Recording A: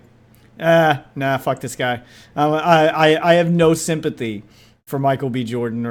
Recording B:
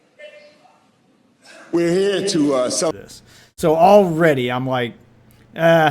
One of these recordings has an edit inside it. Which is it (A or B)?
B